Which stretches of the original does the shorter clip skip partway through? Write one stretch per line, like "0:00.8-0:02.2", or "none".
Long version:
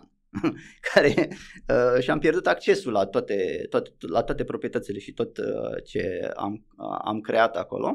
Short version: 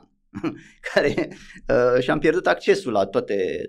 none